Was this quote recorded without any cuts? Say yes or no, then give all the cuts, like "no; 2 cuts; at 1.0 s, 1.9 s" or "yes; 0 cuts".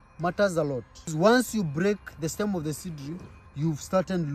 no; 1 cut; at 1.1 s